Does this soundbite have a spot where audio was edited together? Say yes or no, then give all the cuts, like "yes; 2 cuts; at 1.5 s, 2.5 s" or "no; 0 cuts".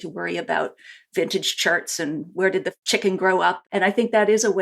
yes; 2 cuts; at 2.8 s, 3.6 s